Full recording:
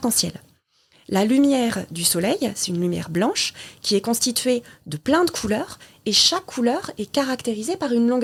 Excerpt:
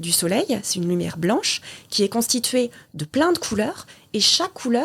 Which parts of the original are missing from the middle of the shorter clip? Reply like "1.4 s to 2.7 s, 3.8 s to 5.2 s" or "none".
none